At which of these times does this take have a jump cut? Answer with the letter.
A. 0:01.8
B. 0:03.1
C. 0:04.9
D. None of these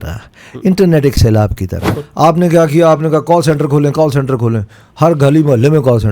A